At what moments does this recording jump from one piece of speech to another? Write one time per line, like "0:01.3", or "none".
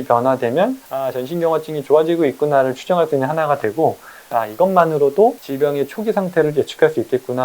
0:00.9
0:04.3